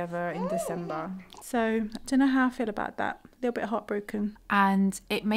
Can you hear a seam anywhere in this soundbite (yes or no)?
yes